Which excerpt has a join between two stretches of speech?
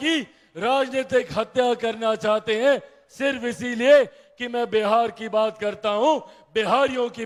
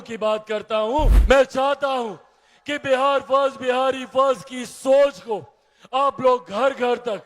second; 1 cut; at 1.2 s

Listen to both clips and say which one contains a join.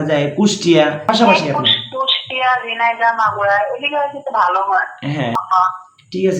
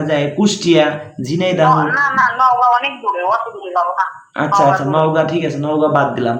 first; 2 cuts; at 1.0 s, 5.4 s

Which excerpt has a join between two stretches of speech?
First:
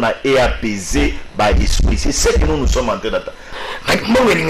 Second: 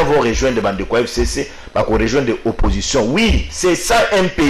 first; 1 cut; at 3.5 s

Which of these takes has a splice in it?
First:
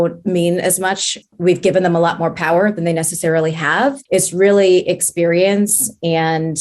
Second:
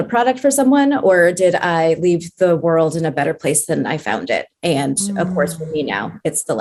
first; 1 cut; at 1.1 s

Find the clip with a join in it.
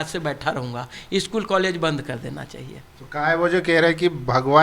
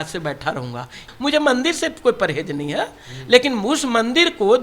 second; 1 cut; at 0.9 s

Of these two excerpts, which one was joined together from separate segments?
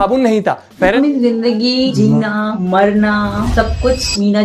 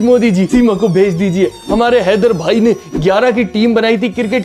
first; 1 cut; at 0.9 s

